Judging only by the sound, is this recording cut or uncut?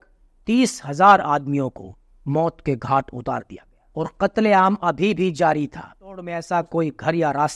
cut